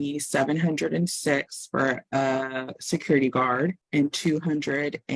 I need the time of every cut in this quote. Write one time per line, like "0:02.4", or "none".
0:03.8